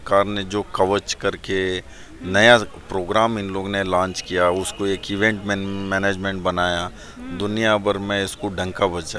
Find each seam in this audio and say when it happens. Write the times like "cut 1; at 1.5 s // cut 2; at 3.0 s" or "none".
none